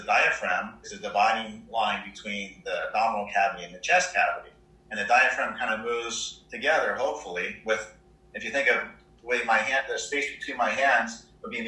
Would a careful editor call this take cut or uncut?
uncut